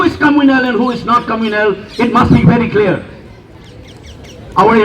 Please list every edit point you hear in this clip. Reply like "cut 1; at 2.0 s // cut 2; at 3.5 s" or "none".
none